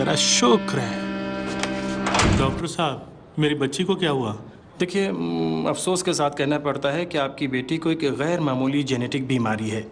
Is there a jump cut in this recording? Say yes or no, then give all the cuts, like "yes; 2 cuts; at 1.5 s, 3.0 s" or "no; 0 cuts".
yes; 1 cut; at 2.4 s